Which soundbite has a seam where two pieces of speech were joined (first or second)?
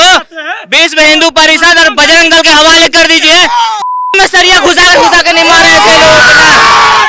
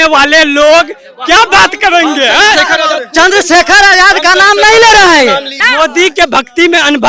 second